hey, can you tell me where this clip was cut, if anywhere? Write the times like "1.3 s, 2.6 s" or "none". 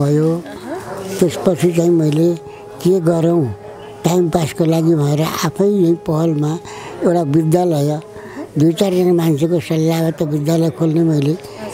none